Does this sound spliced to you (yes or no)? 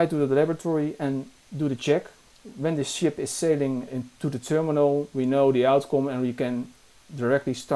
no